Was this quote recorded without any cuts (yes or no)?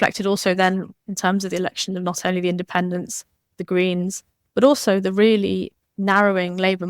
no